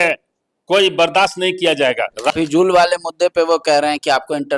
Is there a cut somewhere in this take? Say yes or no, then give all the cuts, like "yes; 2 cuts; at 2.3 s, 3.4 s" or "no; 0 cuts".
yes; 1 cut; at 2.3 s